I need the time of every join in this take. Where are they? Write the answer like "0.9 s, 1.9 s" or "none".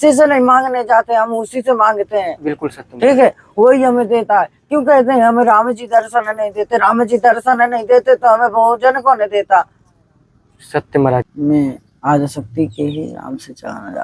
11.3 s